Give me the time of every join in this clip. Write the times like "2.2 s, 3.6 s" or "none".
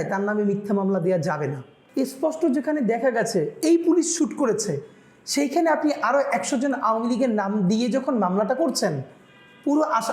1.8 s